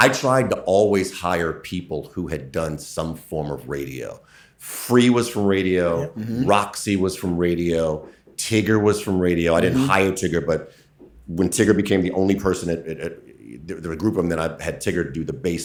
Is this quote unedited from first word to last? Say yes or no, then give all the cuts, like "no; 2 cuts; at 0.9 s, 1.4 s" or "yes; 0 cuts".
yes; 0 cuts